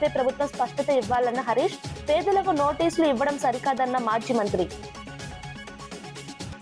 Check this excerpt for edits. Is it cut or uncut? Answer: uncut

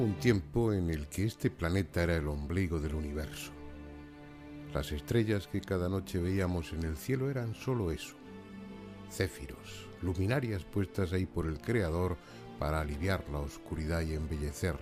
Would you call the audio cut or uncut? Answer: uncut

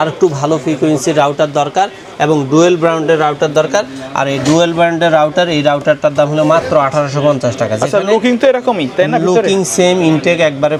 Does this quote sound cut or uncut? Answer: uncut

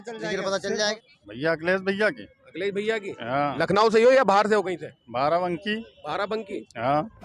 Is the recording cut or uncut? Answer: cut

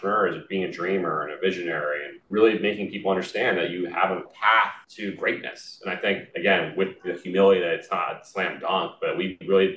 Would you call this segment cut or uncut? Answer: cut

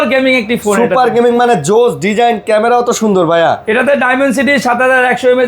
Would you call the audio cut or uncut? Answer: uncut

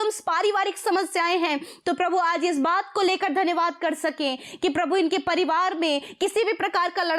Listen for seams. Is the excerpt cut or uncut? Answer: uncut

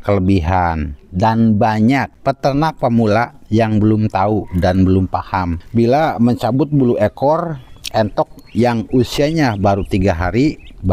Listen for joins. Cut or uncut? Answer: cut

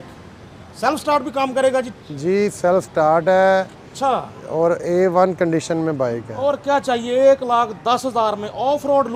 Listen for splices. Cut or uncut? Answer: uncut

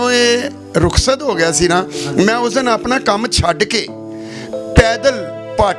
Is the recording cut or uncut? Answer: uncut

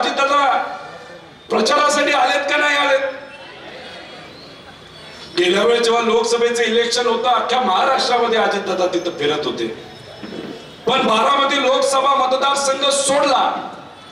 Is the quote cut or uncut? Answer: uncut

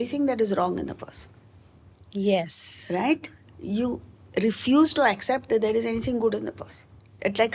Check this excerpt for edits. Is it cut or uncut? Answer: uncut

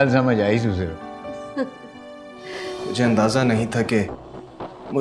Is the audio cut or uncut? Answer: cut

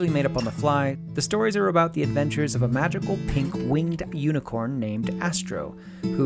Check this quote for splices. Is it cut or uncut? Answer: cut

